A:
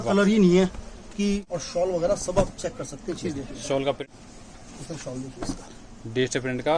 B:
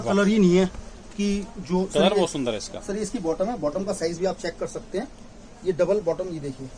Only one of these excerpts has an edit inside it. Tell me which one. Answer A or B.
A